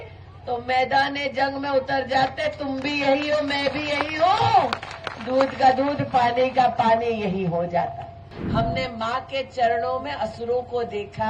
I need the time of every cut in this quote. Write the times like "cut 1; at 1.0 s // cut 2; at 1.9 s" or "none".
cut 1; at 8.3 s